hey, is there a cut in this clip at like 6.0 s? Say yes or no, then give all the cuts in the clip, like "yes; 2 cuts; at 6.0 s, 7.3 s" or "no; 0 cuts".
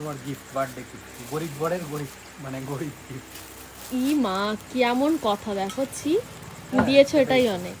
no; 0 cuts